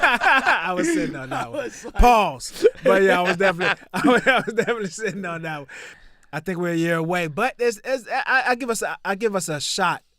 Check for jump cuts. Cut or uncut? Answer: cut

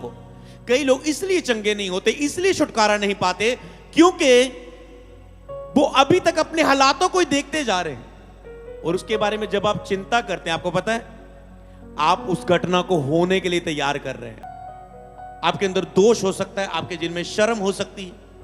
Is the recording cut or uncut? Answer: cut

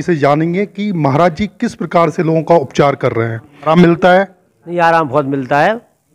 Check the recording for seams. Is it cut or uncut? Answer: cut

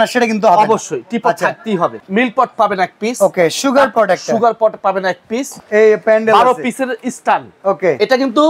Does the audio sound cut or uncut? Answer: cut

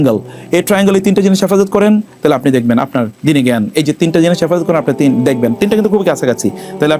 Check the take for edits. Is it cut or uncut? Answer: uncut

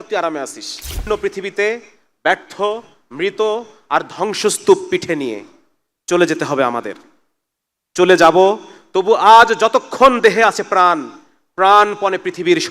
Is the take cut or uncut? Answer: cut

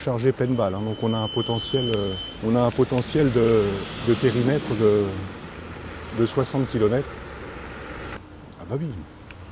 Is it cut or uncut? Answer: cut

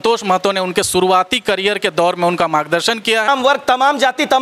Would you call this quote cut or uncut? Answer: cut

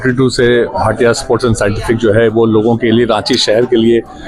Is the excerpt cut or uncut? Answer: uncut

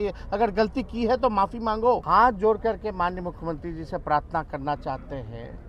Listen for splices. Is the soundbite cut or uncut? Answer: cut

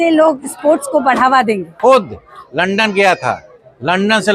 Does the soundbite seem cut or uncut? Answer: cut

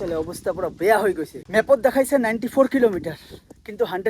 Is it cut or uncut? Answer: cut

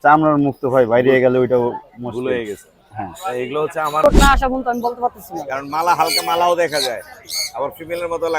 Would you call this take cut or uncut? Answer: cut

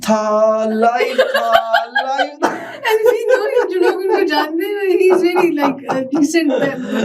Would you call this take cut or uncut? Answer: uncut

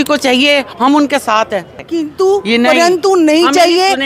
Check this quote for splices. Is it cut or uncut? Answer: cut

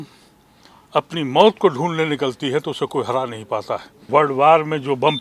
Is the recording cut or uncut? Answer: cut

